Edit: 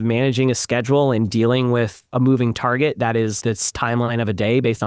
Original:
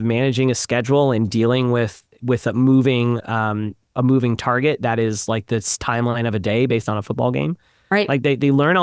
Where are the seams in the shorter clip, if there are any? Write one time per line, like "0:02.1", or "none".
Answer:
0:02.0
0:03.4